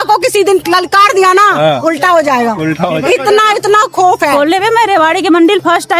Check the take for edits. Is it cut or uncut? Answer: cut